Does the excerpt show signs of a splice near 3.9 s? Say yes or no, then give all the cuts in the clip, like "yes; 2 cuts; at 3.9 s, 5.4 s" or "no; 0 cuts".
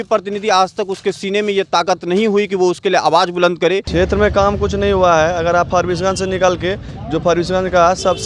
yes; 1 cut; at 3.9 s